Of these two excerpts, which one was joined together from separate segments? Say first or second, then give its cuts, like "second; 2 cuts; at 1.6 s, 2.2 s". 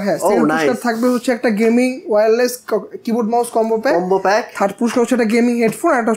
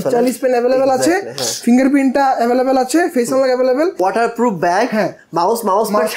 second; 1 cut; at 4.0 s